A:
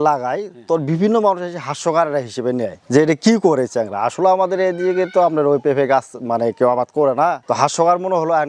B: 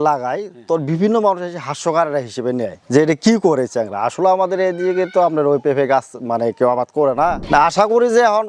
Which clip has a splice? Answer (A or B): B